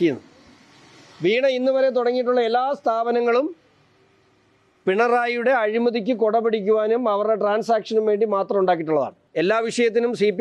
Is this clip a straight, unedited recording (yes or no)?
no